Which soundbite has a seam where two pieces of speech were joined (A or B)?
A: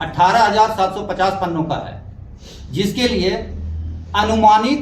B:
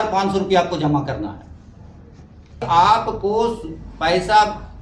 B